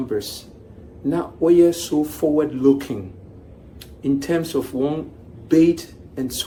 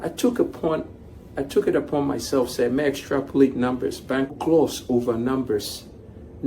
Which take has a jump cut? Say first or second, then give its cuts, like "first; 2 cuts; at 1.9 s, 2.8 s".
second; 1 cut; at 4.4 s